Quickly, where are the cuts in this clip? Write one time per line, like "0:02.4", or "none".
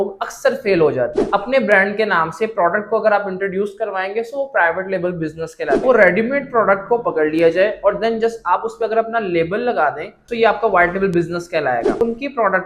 0:01.2
0:05.8
0:12.0